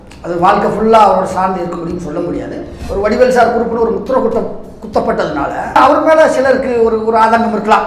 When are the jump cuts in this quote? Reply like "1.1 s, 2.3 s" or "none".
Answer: 2.8 s, 5.8 s